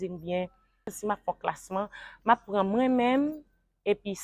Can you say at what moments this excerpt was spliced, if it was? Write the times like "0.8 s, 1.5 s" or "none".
1.0 s